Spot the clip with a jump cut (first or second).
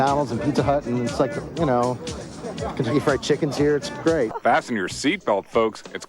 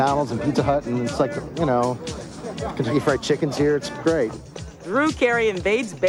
first